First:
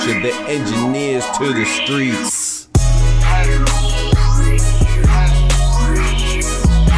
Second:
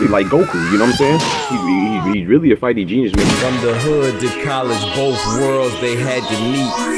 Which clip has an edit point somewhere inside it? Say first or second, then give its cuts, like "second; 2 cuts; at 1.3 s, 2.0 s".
second; 1 cut; at 3.2 s